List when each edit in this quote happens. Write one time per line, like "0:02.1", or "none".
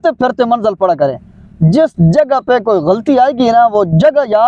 none